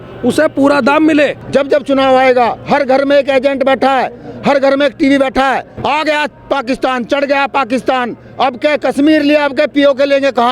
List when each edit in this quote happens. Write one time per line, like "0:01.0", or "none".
0:01.4
0:05.7